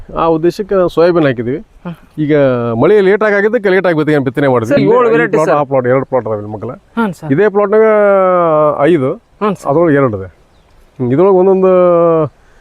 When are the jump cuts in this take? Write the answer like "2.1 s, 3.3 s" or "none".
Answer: 4.8 s